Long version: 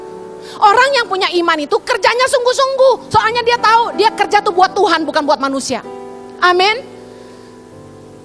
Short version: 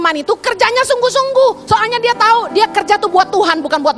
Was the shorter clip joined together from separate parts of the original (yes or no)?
no